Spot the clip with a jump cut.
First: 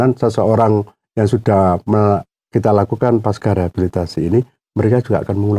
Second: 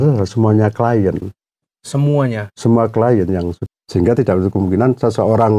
second; 1 cut; at 3.6 s

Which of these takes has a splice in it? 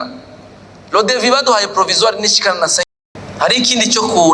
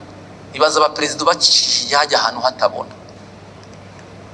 first; 1 cut; at 2.9 s

